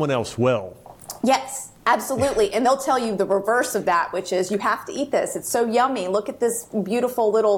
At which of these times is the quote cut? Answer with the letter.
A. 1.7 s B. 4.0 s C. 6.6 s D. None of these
D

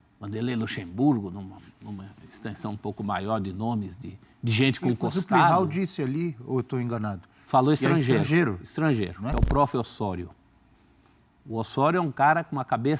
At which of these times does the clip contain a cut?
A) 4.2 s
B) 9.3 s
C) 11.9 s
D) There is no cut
B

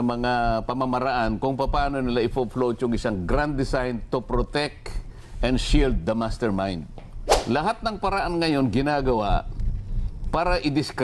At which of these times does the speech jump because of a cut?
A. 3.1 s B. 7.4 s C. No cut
B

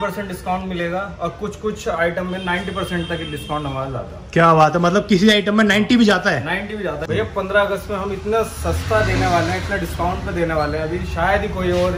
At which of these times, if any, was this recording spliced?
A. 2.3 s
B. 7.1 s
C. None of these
B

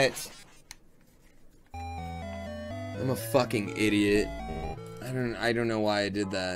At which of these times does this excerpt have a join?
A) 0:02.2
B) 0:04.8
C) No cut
B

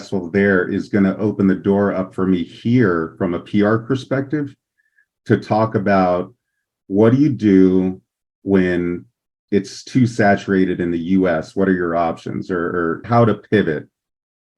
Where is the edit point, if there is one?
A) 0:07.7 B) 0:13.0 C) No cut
B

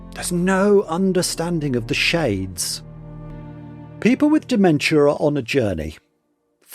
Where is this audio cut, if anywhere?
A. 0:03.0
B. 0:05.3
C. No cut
A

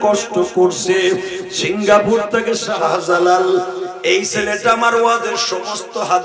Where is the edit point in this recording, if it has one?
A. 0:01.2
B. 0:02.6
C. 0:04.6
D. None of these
B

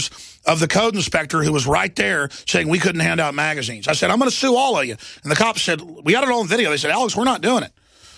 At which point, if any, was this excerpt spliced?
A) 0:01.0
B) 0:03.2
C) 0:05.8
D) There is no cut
D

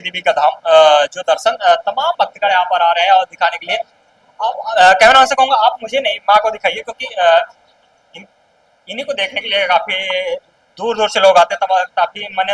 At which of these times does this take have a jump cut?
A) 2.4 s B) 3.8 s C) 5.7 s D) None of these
D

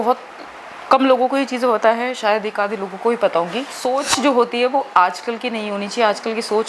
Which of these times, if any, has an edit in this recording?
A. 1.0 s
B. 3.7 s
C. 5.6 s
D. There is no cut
B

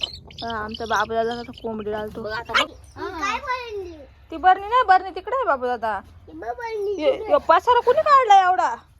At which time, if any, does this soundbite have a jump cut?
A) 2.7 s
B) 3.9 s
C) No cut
A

